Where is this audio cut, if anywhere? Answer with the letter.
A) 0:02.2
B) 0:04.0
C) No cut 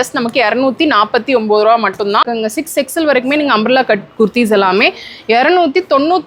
A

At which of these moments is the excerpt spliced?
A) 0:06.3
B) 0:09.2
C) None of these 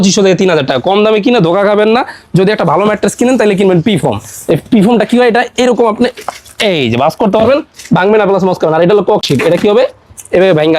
C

